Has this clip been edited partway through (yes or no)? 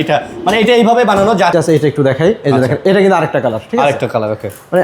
yes